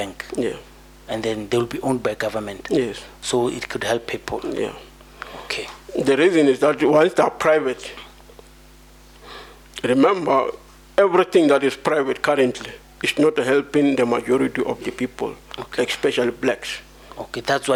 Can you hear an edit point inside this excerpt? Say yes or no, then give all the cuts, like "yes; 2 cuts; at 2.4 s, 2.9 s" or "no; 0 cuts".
no; 0 cuts